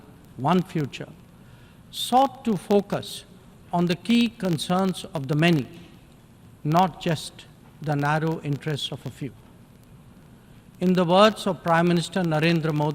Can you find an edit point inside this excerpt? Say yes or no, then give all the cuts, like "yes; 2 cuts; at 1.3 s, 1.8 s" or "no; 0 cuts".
no; 0 cuts